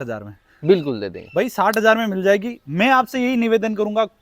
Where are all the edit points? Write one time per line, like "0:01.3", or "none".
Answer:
none